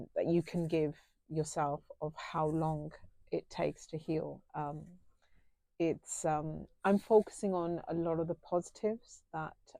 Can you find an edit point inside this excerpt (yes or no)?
no